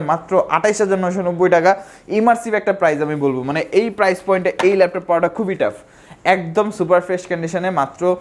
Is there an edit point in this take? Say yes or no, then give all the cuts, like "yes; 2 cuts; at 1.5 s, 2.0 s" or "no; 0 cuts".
no; 0 cuts